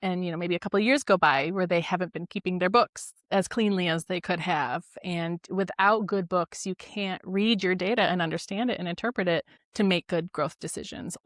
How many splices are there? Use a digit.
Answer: 1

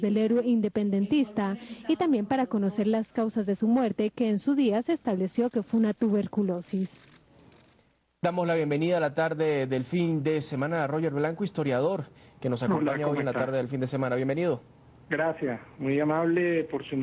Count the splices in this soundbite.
1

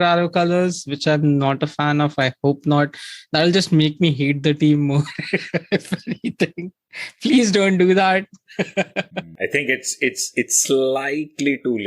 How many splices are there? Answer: 1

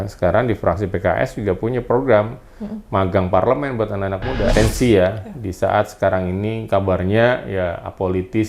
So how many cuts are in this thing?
1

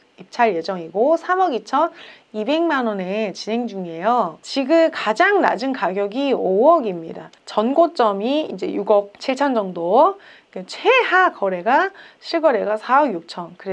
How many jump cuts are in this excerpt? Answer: 1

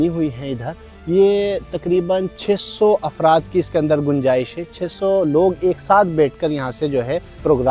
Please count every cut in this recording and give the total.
0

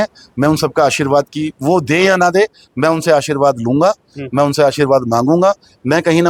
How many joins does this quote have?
0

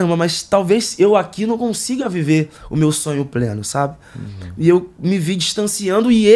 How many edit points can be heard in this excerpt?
0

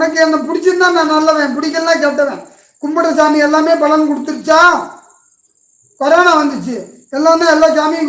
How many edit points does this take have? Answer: 0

